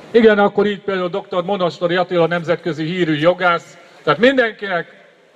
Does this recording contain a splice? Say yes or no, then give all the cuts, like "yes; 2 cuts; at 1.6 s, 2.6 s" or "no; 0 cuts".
yes; 1 cut; at 3.9 s